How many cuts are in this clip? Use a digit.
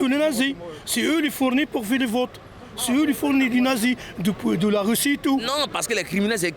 1